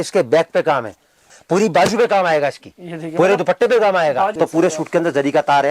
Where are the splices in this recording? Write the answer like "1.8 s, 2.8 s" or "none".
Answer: 1.4 s, 4.3 s